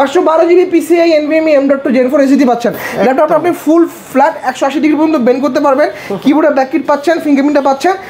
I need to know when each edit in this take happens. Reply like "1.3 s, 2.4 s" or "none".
none